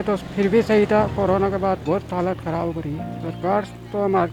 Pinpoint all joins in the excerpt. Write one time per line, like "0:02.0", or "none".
none